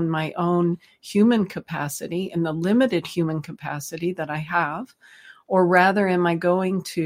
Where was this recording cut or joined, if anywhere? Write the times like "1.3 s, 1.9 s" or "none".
none